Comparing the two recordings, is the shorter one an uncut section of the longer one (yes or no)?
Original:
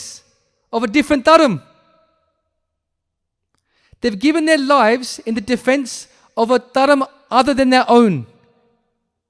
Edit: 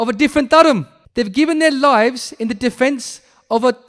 no